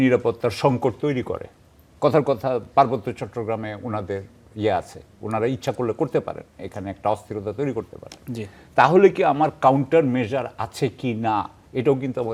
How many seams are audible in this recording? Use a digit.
0